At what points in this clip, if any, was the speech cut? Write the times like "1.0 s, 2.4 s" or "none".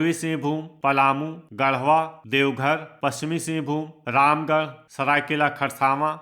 0.9 s, 2.2 s, 4.8 s